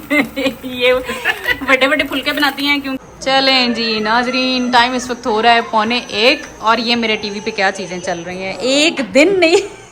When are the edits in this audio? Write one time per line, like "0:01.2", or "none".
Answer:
0:03.1